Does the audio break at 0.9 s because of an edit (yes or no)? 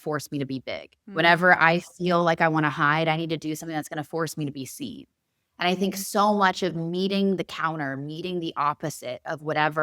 yes